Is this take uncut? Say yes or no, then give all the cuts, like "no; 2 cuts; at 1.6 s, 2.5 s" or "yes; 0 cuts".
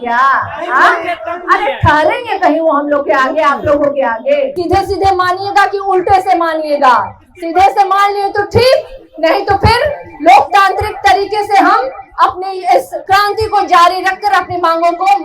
no; 2 cuts; at 4.5 s, 12.9 s